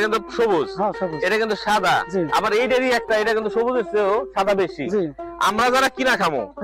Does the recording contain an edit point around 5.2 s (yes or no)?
yes